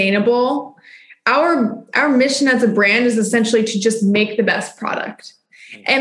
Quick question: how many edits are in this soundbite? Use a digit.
0